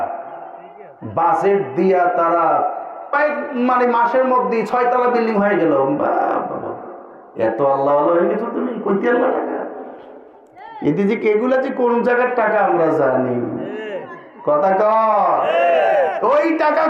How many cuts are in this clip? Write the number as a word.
one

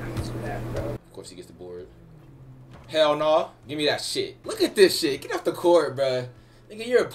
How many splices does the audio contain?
two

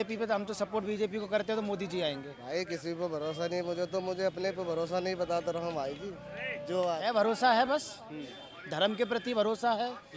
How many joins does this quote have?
two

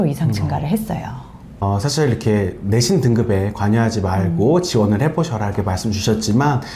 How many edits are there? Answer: one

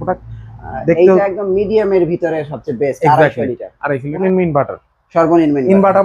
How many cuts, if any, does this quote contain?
one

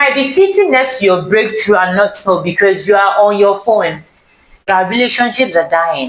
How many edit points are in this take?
one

